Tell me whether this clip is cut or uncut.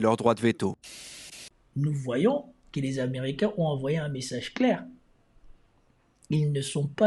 cut